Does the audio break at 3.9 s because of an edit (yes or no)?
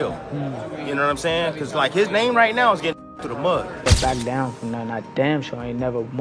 yes